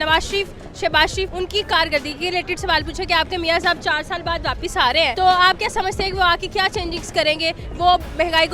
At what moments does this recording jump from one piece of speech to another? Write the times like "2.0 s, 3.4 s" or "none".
1.3 s, 5.1 s